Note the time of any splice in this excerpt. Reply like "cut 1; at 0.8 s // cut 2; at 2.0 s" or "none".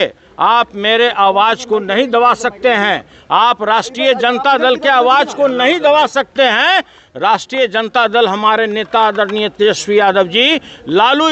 none